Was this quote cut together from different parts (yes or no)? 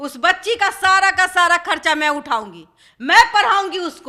no